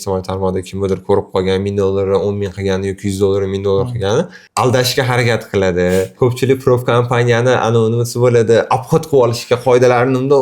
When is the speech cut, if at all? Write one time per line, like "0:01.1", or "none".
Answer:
0:04.4